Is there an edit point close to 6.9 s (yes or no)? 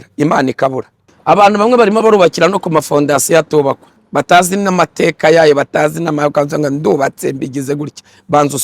no